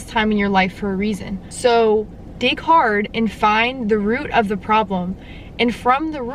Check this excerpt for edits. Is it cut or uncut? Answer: uncut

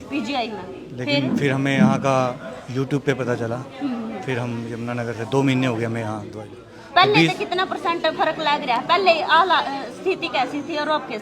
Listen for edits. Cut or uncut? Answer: uncut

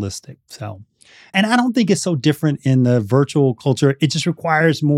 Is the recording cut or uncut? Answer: cut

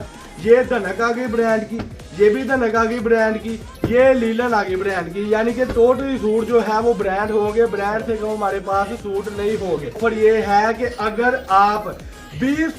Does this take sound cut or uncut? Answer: cut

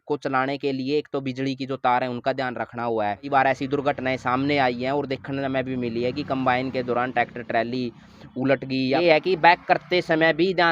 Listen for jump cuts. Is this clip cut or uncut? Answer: cut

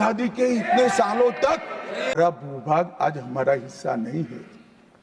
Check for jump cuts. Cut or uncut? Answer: cut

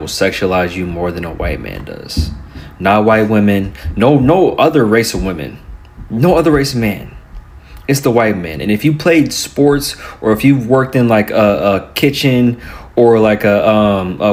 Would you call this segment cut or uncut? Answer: uncut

